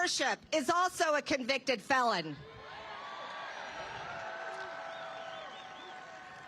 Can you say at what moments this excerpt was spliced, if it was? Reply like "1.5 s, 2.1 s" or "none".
none